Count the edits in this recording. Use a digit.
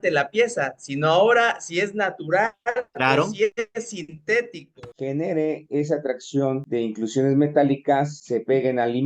1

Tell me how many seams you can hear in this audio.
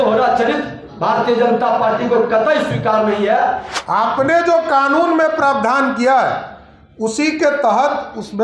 1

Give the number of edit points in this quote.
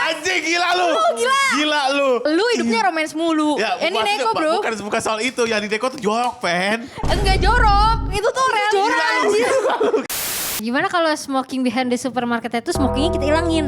2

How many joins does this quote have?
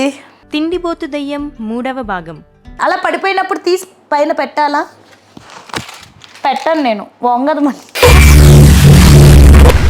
1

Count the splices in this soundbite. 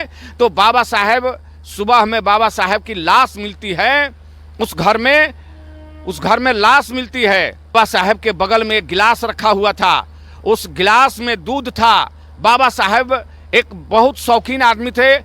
1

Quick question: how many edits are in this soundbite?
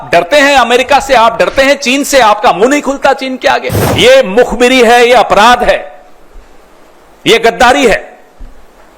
1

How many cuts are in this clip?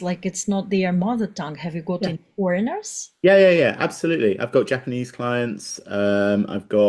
0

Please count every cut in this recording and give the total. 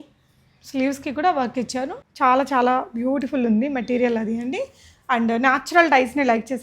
1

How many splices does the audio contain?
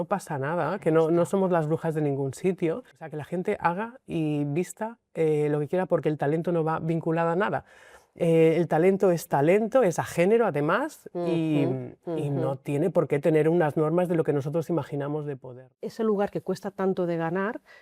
2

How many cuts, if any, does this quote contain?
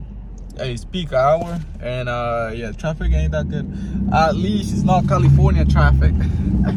0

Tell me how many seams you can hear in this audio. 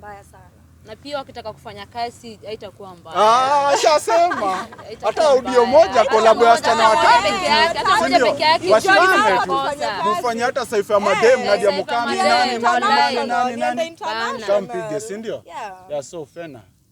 0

